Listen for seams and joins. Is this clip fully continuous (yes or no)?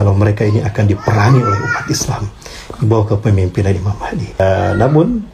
no